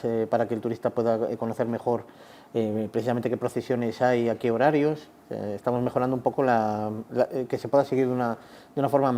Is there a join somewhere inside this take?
no; 0 cuts

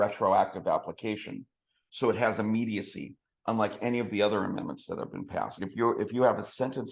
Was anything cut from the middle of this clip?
yes; 1 cut; at 5.6 s

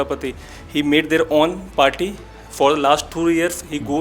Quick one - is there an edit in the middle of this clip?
no; 0 cuts

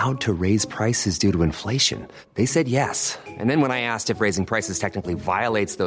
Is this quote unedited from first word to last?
yes; 0 cuts

